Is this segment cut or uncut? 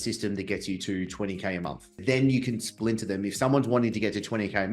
cut